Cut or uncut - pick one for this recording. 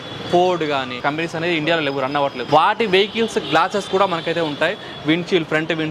cut